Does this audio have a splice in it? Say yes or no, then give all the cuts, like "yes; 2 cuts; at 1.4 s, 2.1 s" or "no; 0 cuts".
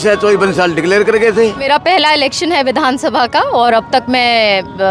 yes; 1 cut; at 1.6 s